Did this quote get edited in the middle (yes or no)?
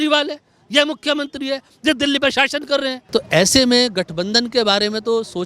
yes